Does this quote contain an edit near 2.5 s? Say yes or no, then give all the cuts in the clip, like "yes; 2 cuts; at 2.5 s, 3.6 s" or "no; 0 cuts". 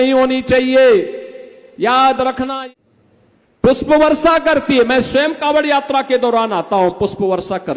yes; 1 cut; at 2.5 s